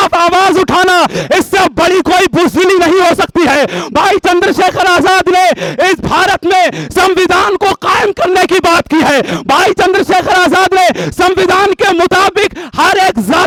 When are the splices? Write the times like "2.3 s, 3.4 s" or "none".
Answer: none